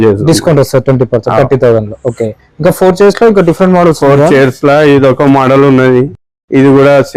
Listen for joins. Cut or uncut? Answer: uncut